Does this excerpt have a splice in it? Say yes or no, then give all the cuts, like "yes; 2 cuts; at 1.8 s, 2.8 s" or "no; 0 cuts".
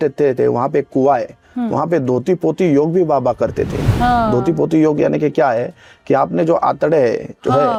no; 0 cuts